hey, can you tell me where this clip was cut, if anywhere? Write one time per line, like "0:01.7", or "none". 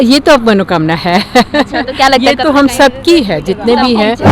none